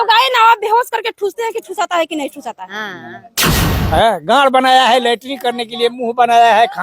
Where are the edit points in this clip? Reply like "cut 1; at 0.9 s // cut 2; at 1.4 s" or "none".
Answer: cut 1; at 3.4 s